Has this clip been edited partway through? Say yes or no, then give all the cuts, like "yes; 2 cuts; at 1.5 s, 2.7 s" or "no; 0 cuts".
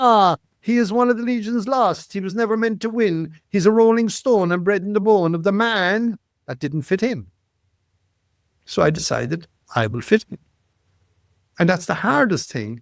no; 0 cuts